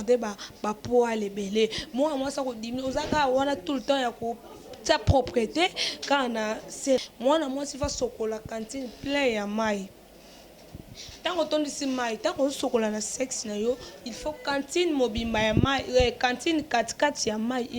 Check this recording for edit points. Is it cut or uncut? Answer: cut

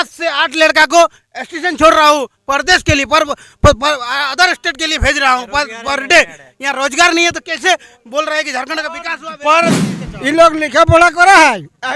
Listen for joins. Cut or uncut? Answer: cut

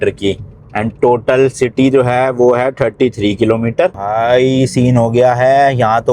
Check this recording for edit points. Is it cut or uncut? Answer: cut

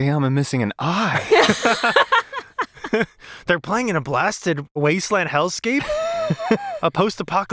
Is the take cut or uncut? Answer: uncut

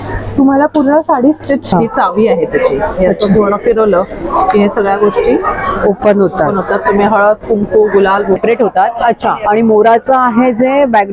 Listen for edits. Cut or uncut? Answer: cut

